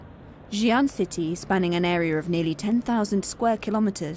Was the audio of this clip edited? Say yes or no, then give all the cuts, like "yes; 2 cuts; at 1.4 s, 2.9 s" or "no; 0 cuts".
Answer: yes; 1 cut; at 1.1 s